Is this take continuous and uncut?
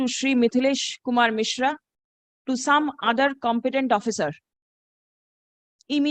yes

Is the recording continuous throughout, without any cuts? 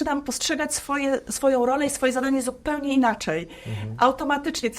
yes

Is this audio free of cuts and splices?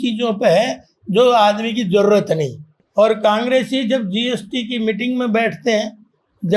no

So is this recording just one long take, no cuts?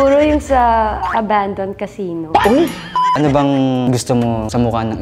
no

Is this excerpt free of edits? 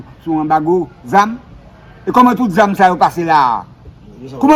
yes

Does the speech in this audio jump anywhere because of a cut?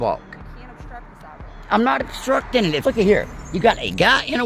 yes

